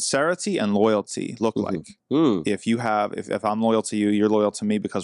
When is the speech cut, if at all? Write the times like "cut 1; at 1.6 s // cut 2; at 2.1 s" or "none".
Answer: none